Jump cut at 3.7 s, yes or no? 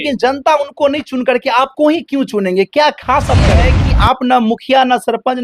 yes